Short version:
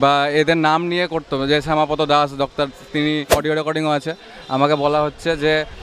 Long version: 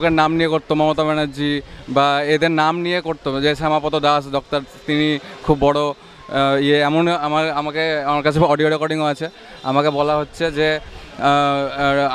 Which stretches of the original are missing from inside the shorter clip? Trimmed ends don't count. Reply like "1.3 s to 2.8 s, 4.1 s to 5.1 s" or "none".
5.3 s to 8.6 s